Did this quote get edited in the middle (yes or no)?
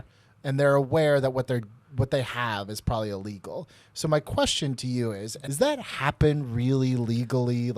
yes